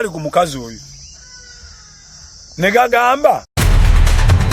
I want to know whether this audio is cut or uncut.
cut